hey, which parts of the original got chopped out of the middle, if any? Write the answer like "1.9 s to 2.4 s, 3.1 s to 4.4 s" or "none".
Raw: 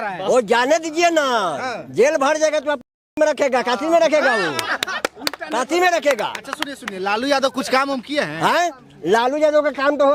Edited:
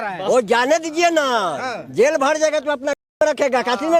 none